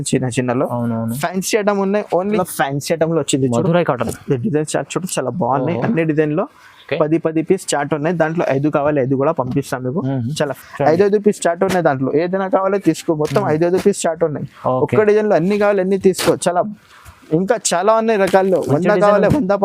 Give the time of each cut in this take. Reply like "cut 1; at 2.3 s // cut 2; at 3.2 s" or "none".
cut 1; at 2.4 s // cut 2; at 10.6 s